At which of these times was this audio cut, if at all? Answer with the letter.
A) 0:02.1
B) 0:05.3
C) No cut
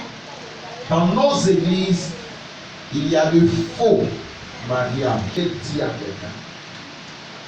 B